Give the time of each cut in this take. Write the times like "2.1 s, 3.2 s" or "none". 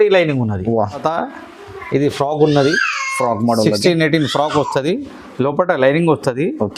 1.0 s